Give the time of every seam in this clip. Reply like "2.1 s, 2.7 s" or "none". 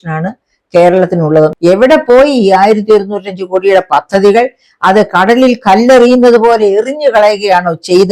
1.5 s

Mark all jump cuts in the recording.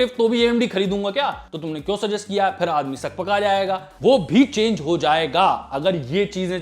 1.5 s, 3.9 s

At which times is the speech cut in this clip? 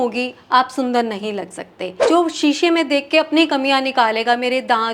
2.0 s

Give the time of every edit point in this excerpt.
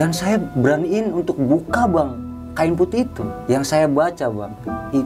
3.3 s

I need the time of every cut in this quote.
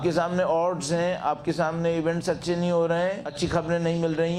3.3 s

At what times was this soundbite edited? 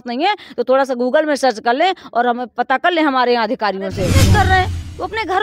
4.3 s

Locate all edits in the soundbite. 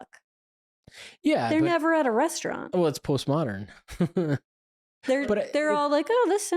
4.9 s

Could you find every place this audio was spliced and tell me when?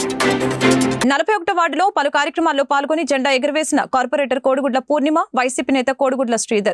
1.0 s

